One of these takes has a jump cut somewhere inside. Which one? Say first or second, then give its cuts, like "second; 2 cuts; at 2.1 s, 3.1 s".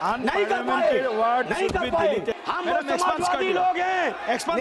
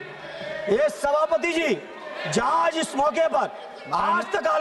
first; 1 cut; at 2.4 s